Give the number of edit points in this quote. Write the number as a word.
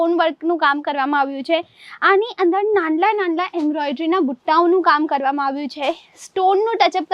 zero